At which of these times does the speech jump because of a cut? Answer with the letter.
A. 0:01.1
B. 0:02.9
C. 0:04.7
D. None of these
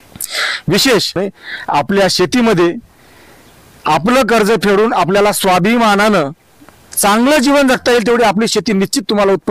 A